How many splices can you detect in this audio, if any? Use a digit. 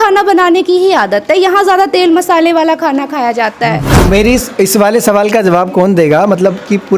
1